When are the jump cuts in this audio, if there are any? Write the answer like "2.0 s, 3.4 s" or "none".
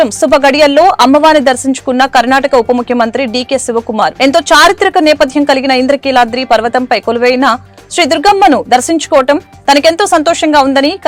none